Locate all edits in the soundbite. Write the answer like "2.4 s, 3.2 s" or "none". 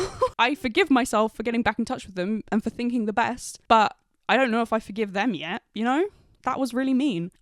none